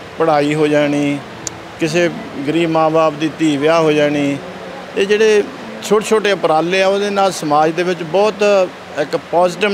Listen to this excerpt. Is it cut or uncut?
cut